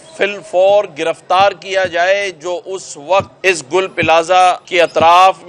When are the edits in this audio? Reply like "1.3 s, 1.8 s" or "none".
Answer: 3.3 s, 4.6 s